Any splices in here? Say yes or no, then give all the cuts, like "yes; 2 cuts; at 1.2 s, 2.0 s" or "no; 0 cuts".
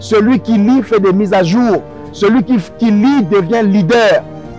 no; 0 cuts